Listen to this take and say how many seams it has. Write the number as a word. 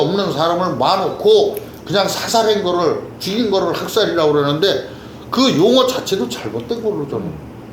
zero